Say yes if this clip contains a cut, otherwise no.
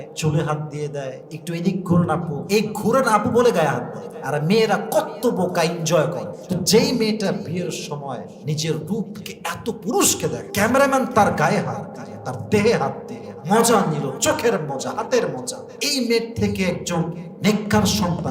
yes